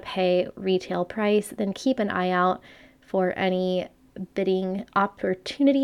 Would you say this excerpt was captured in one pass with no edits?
yes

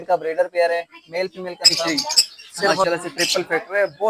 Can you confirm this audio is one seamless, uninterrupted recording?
no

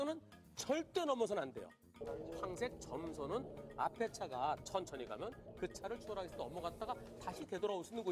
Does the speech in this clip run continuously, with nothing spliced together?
no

